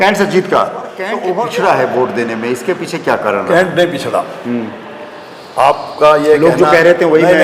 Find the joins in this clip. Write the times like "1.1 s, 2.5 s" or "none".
1.2 s